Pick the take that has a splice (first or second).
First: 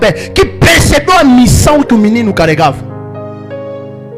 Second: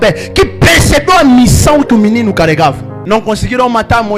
second